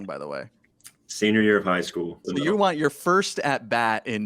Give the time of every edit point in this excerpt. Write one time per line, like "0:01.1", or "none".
0:02.3